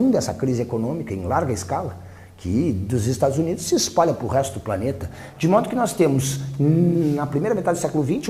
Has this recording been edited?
no; 0 cuts

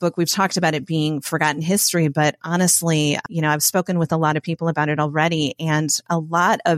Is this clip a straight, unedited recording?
no; 1 cut; at 3.2 s

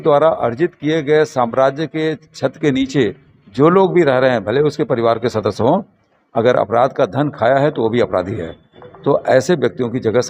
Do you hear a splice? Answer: no; 0 cuts

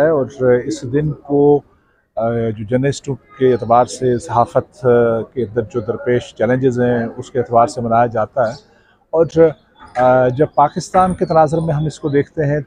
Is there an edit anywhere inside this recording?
no; 0 cuts

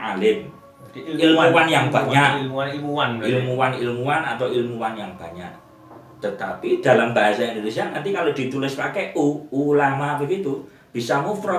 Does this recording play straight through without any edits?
yes; 0 cuts

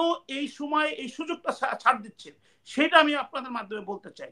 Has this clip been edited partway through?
no; 0 cuts

